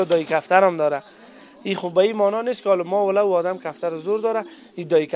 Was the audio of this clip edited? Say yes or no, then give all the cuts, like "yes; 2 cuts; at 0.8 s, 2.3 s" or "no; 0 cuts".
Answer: no; 0 cuts